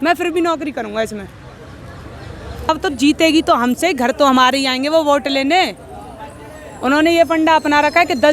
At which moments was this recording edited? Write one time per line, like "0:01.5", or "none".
0:02.7